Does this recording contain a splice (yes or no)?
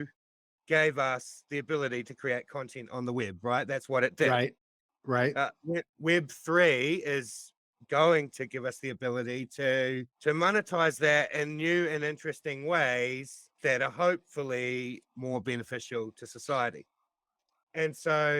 no